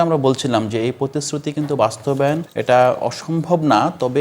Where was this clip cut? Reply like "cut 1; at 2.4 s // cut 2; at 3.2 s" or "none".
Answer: cut 1; at 2.5 s